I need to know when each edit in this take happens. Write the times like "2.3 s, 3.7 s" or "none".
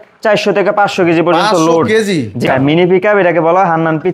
2.4 s

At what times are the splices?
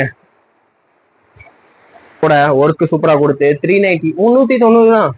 2.2 s

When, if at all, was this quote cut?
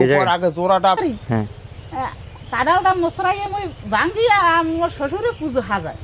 1.0 s

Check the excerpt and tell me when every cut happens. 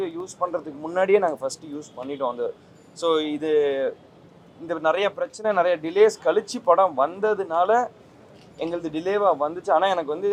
none

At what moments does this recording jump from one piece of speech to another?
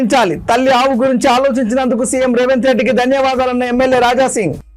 none

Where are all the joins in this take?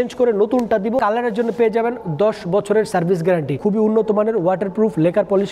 1.0 s, 3.5 s

